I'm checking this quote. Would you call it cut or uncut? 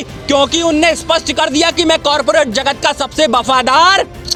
uncut